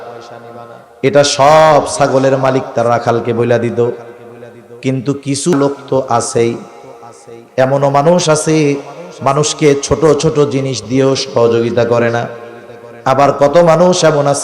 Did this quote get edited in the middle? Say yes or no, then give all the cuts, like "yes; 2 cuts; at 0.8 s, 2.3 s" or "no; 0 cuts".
yes; 1 cut; at 5.5 s